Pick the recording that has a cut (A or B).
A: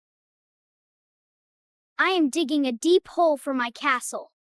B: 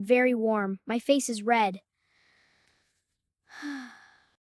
B